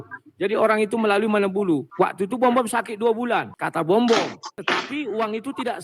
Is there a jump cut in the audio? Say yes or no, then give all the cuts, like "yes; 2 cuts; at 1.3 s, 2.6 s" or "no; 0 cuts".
yes; 3 cuts; at 1.9 s, 3.6 s, 4.5 s